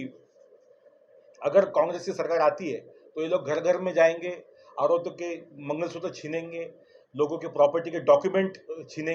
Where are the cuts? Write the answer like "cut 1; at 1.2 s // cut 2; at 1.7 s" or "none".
none

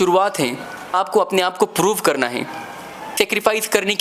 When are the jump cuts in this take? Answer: cut 1; at 0.9 s // cut 2; at 3.1 s

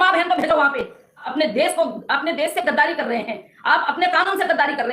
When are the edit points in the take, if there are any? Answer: cut 1; at 1.3 s

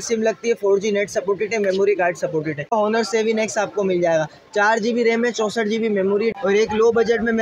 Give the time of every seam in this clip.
cut 1; at 2.7 s // cut 2; at 6.4 s

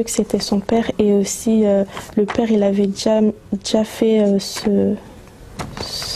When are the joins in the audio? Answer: none

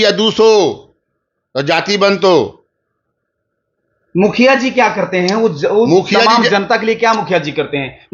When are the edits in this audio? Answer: none

